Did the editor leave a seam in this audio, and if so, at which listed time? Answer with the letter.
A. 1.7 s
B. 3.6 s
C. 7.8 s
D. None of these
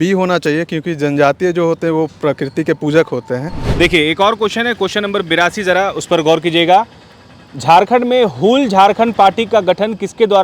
B